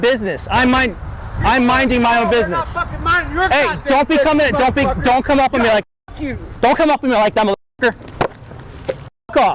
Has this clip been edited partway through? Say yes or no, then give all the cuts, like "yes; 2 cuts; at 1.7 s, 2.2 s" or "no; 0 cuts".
no; 0 cuts